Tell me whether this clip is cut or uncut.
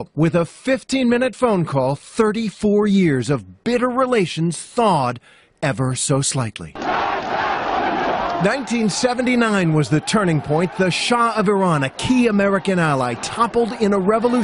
uncut